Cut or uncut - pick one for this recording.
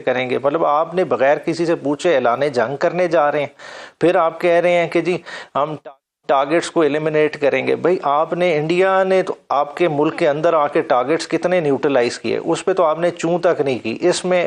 uncut